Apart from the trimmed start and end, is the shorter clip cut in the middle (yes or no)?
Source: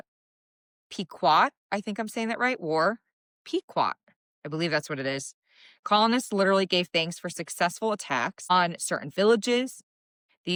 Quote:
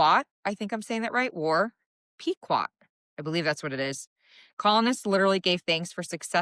no